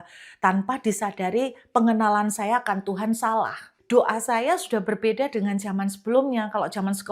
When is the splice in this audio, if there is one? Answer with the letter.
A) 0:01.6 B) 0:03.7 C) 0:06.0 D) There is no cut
B